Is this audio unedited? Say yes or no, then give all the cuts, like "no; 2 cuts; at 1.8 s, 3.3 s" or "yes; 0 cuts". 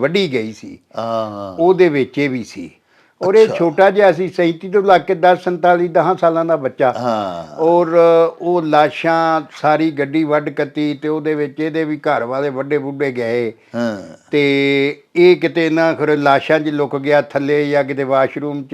yes; 0 cuts